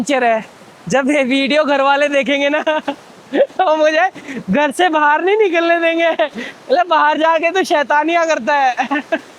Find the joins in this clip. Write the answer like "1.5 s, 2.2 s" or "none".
none